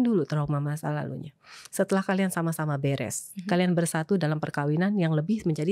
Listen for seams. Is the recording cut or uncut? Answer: uncut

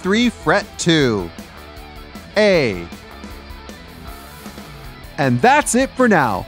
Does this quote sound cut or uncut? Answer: uncut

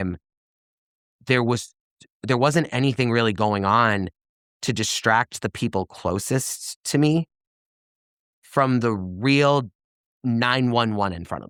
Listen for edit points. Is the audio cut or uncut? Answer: uncut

